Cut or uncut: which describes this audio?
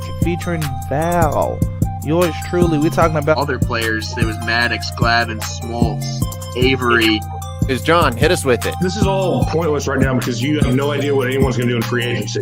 uncut